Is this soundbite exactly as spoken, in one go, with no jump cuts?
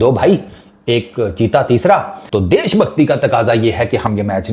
no; 1 cut; at 2.2 s

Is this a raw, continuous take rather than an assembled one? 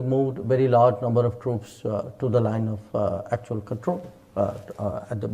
yes; 0 cuts

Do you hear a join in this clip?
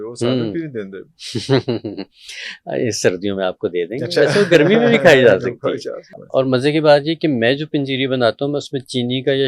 yes; 1 cut; at 6.2 s

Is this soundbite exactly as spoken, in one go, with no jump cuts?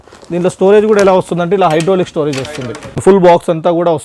no; 1 cut; at 3.0 s

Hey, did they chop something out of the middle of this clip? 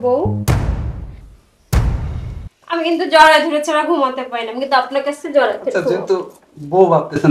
yes; 1 cut; at 2.6 s

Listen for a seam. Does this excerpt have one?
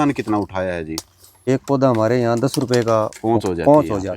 yes; 1 cut; at 1.5 s

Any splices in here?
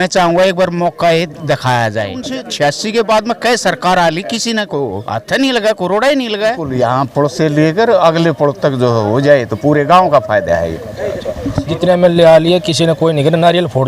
yes; 3 cuts; at 2.2 s, 6.8 s, 11.6 s

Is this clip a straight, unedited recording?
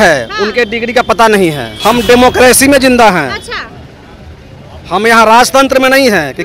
no; 1 cut; at 1.7 s

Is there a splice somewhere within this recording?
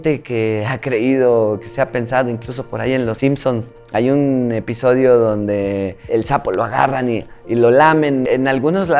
no; 0 cuts

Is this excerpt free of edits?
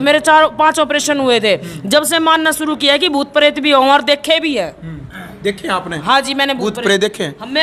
yes; 0 cuts

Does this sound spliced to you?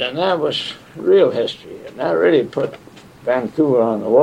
no; 0 cuts

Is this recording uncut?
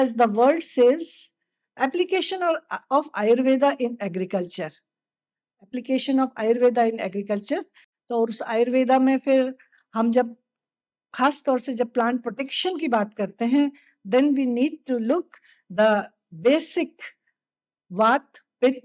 yes; 0 cuts

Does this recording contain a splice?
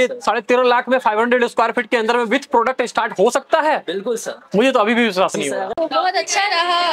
yes; 1 cut; at 5.7 s

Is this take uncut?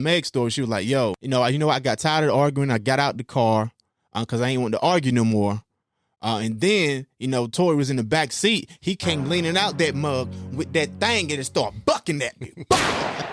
no; 1 cut; at 1.2 s

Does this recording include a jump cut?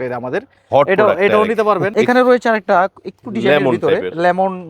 yes; 1 cut; at 1.9 s

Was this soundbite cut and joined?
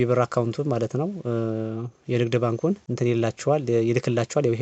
yes; 1 cut; at 2.9 s

